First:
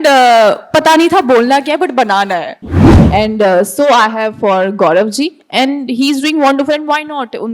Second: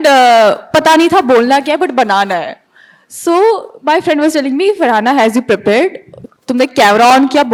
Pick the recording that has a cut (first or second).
first